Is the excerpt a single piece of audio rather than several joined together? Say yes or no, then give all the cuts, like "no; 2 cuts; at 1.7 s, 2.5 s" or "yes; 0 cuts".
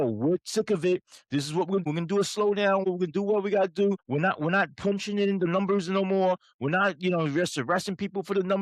no; 3 cuts; at 1.8 s, 2.8 s, 4.0 s